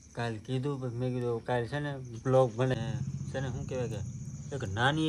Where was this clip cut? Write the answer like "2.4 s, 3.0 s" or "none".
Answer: 2.7 s